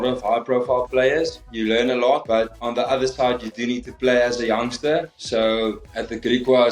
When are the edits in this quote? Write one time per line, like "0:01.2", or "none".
0:01.4
0:02.2
0:05.1